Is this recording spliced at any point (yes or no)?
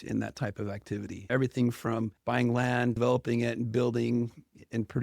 yes